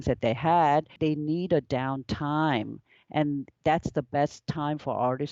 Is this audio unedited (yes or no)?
no